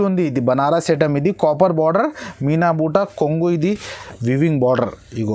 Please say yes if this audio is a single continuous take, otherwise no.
no